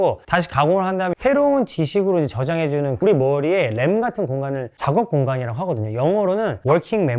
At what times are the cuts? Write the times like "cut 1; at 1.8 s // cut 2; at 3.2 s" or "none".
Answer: none